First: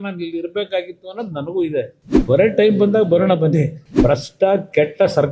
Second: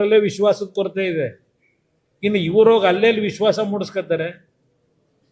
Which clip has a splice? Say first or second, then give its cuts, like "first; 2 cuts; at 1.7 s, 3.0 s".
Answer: first; 2 cuts; at 2.1 s, 3.8 s